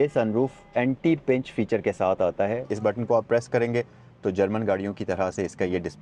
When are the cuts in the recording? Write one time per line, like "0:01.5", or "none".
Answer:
0:02.7